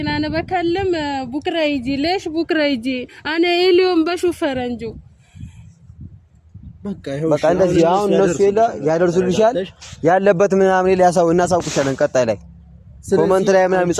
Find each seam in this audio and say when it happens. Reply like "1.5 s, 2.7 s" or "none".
none